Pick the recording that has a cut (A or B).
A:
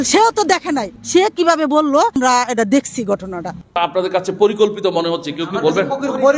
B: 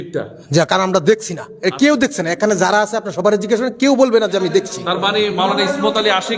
A